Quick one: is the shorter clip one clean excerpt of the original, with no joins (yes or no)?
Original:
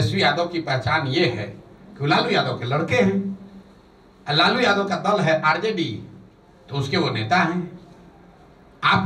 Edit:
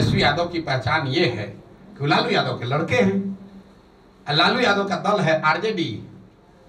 yes